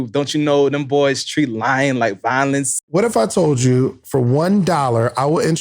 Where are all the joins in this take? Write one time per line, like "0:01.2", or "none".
0:02.7